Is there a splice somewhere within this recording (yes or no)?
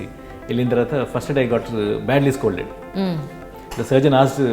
yes